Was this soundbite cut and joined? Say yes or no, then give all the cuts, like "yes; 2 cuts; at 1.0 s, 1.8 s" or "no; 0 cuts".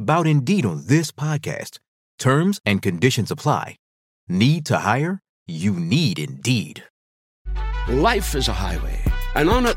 yes; 1 cut; at 7.4 s